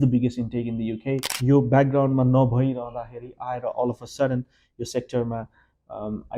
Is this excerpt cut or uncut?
cut